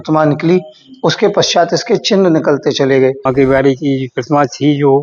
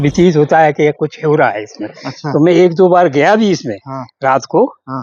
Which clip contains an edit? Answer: first; 1 cut; at 3.3 s

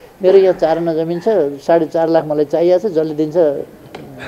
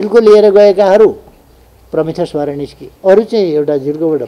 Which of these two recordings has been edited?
second; 1 cut; at 2.8 s

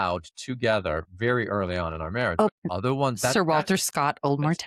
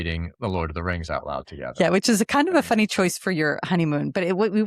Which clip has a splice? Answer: first; 1 cut; at 2.5 s

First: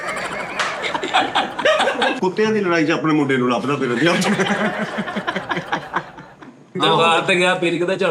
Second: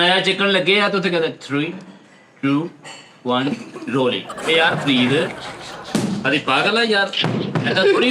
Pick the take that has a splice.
first; 2 cuts; at 2.2 s, 6.7 s

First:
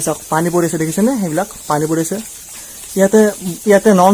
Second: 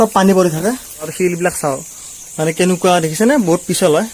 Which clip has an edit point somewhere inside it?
second; 1 cut; at 1.1 s

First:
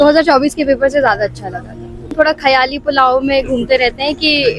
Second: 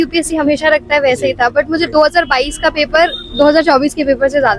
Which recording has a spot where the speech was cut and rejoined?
first; 1 cut; at 2.1 s

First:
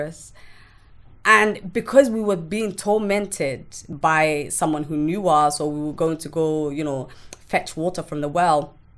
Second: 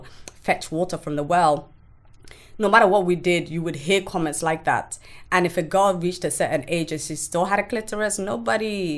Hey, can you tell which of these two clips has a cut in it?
first; 1 cut; at 3.9 s

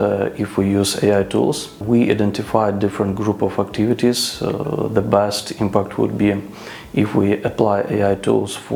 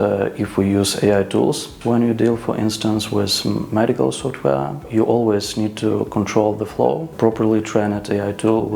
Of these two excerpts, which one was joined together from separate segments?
second; 2 cuts; at 1.7 s, 7.1 s

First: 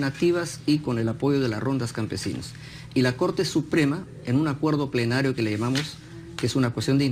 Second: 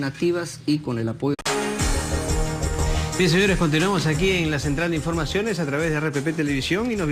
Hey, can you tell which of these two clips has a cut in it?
first; 1 cut; at 1.3 s

